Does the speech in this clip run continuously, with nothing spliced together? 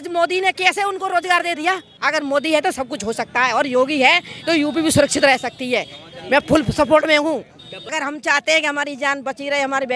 no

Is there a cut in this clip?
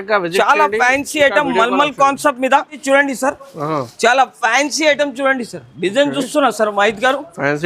yes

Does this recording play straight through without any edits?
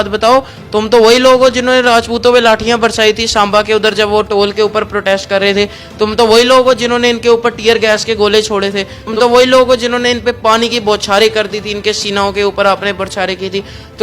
no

